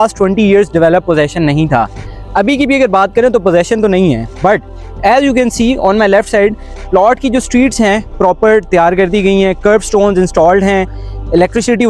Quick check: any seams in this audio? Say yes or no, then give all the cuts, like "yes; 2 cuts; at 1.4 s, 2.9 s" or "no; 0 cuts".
no; 0 cuts